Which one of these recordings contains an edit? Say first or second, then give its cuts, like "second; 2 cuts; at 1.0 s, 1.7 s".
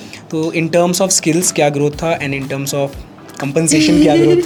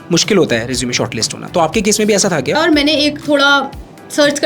second; 1 cut; at 2.6 s